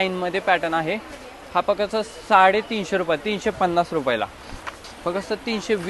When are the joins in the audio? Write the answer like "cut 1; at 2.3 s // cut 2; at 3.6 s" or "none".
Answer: cut 1; at 4.8 s